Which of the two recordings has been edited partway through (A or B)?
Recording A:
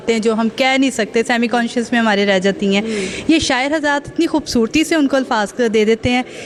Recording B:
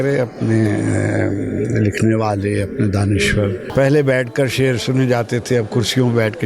B